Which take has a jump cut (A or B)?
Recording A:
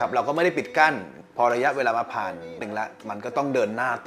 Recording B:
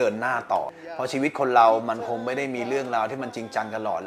A